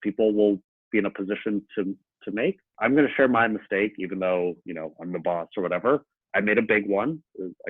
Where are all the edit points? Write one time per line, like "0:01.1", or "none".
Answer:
0:02.7

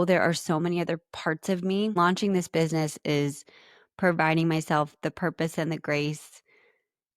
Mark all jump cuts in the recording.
0:02.0

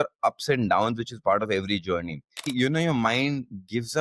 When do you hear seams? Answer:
0:02.5

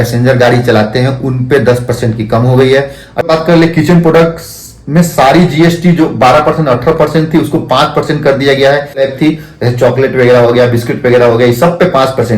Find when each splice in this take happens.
0:03.3
0:09.0

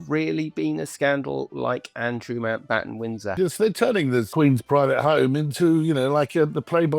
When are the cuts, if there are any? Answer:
0:03.3
0:04.3

